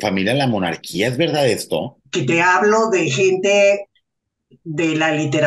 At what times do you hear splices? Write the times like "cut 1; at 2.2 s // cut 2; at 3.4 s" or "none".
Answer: cut 1; at 2.0 s